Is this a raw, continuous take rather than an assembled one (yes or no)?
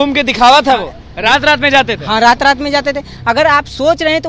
yes